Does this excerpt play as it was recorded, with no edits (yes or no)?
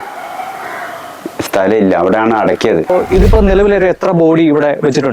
no